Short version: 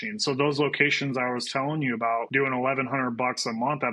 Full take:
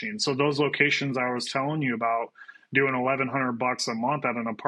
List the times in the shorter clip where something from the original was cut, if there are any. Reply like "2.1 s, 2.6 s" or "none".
2.3 s

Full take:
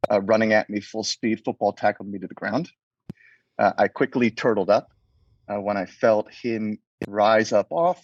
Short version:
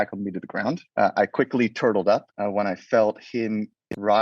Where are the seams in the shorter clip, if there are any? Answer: 0.8 s, 2.3 s

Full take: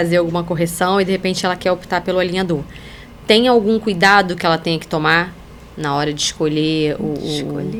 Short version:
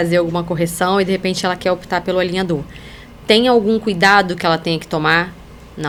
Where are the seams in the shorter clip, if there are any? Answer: none

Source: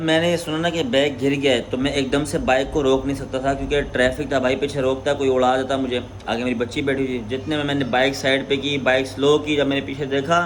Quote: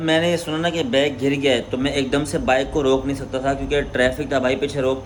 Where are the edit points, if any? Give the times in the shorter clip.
none

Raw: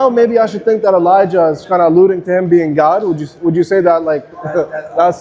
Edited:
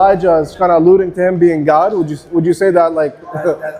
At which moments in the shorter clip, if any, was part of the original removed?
none

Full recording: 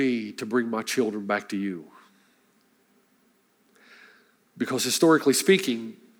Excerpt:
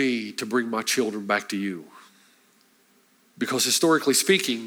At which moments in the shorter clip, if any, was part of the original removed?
3.2 s

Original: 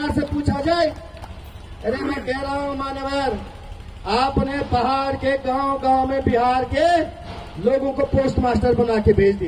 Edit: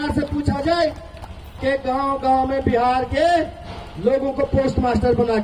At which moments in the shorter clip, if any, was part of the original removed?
1.6 s

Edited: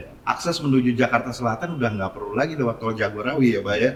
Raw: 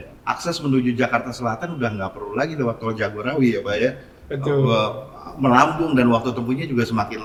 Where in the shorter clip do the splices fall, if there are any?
none

